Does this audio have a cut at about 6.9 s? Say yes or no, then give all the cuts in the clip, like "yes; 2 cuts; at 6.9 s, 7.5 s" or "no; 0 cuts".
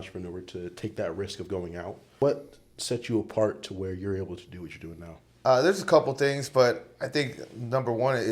no; 2 cuts; at 2.2 s, 5.2 s